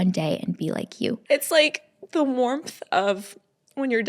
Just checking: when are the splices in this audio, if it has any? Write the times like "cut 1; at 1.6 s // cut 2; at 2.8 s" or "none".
cut 1; at 1.2 s